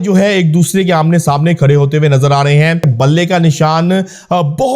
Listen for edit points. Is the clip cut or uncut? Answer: cut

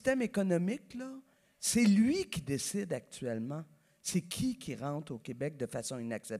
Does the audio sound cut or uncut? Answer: uncut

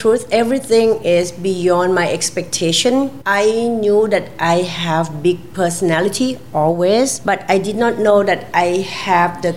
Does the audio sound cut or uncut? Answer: cut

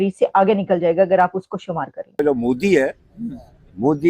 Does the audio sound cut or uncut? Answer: cut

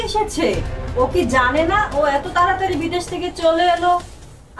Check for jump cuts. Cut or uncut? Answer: uncut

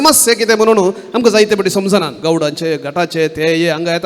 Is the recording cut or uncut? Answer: cut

